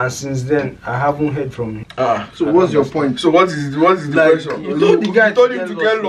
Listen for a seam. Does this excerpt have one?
no; 0 cuts

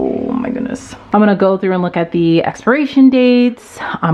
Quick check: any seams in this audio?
yes; 1 cut; at 0.9 s

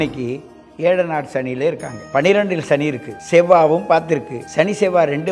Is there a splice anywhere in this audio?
yes; 3 cuts; at 1.9 s, 3.1 s, 4.4 s

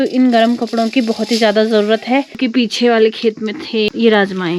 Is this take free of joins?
no; 2 cuts; at 2.4 s, 3.9 s

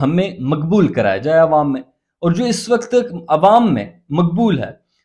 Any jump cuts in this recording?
no; 0 cuts

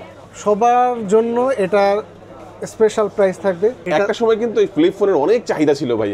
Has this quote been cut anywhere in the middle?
yes; 1 cut; at 3.9 s

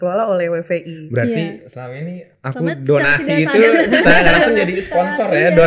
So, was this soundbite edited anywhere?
no; 0 cuts

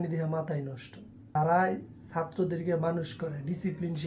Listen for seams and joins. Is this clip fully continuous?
no; 1 cut; at 1.2 s

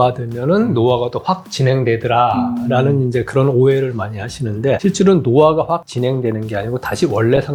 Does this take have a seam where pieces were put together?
no; 0 cuts

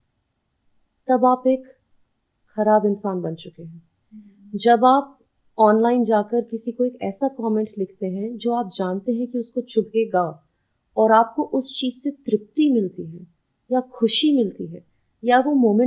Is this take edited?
no; 0 cuts

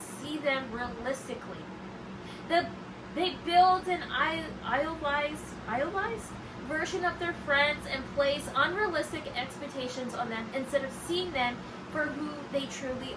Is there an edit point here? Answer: no; 0 cuts

